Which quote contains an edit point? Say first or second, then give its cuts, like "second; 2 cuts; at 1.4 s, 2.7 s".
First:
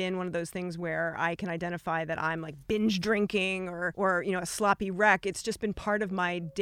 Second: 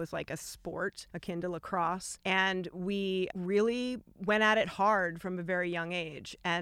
second; 1 cut; at 3.3 s